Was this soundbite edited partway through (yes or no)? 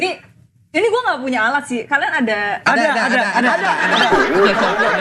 no